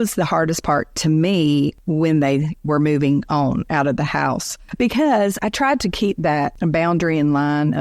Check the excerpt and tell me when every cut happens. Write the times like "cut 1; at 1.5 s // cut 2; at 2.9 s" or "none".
cut 1; at 1.8 s // cut 2; at 4.6 s // cut 3; at 5.4 s // cut 4; at 6.5 s